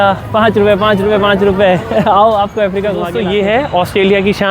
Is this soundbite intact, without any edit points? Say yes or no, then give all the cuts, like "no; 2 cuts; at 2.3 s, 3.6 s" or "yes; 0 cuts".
no; 1 cut; at 3.1 s